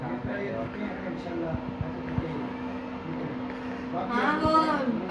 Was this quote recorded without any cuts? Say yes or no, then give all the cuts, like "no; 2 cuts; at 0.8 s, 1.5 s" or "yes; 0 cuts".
yes; 0 cuts